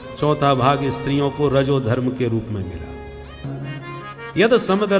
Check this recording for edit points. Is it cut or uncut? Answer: cut